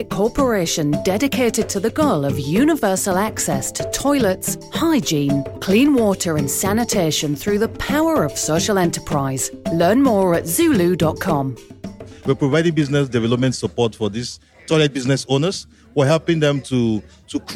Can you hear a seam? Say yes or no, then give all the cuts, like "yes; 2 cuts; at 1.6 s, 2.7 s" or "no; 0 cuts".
yes; 1 cut; at 12.1 s